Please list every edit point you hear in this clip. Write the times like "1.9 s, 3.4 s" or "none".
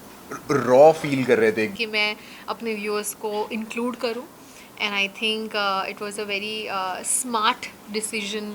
1.7 s